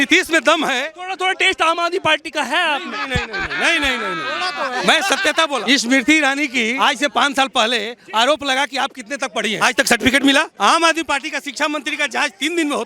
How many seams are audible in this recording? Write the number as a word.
four